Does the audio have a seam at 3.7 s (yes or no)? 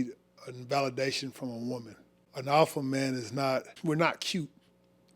yes